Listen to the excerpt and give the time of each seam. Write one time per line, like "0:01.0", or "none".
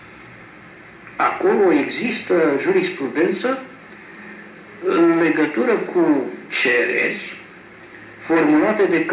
0:05.7